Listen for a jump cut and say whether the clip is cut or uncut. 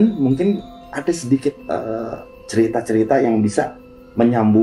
uncut